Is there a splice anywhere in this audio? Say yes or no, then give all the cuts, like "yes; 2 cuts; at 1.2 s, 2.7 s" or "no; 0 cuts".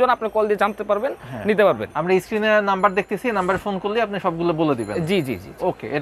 no; 0 cuts